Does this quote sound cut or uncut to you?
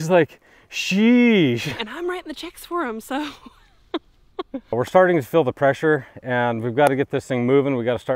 cut